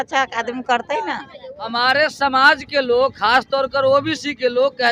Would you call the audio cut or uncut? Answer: cut